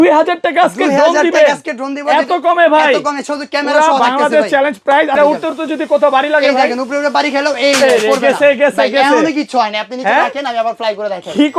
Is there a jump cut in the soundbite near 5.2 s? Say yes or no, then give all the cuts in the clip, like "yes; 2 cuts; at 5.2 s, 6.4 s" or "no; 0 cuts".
yes; 1 cut; at 5.2 s